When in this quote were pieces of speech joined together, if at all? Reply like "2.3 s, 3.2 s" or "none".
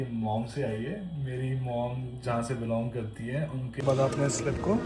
3.8 s